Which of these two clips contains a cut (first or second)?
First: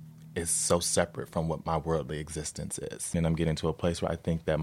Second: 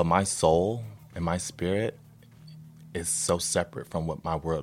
first